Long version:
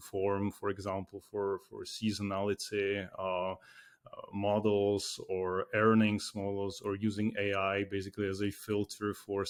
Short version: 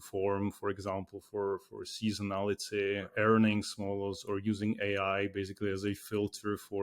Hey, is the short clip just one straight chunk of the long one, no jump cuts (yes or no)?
no